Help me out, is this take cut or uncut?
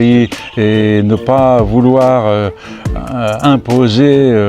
uncut